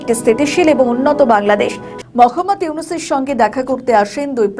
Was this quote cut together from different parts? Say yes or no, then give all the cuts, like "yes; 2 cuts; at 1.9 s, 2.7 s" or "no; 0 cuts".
yes; 1 cut; at 1.9 s